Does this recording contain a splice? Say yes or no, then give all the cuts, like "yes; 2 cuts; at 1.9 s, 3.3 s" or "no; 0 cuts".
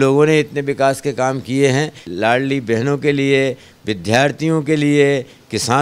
yes; 1 cut; at 2.1 s